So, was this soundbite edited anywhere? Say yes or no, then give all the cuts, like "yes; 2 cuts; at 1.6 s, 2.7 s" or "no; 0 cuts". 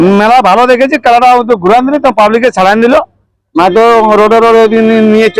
no; 0 cuts